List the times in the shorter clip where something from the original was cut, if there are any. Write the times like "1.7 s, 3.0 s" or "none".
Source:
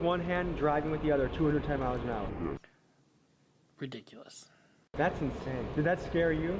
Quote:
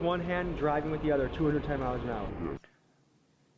none